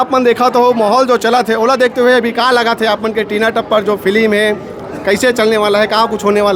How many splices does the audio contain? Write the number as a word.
zero